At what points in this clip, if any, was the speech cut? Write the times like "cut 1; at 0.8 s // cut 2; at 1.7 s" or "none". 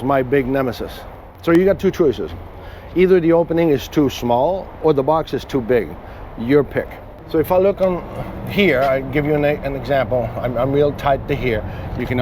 none